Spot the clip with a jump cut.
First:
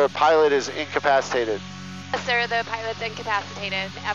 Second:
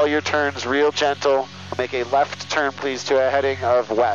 second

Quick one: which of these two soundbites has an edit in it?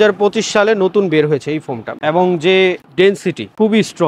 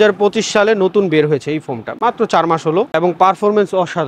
first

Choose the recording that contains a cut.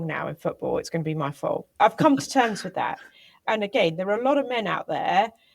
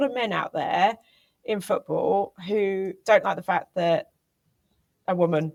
first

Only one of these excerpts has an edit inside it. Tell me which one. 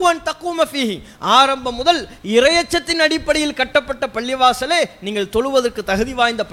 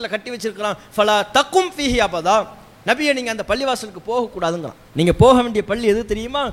second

